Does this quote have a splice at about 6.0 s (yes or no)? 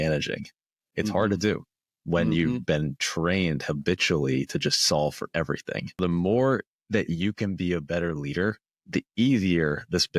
yes